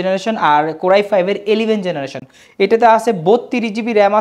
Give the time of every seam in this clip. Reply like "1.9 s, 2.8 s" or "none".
none